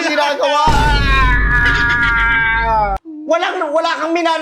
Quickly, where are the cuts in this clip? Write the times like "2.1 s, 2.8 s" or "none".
3.0 s